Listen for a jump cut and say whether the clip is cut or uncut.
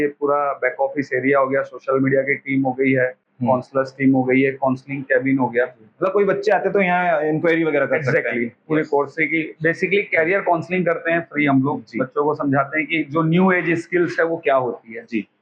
uncut